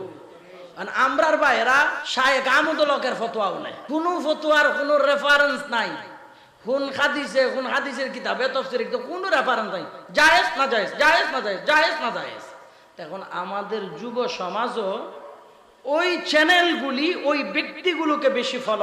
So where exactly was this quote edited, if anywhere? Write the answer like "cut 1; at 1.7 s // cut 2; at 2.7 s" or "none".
cut 1; at 2.0 s // cut 2; at 3.7 s